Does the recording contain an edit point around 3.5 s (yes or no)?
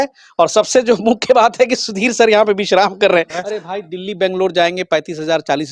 yes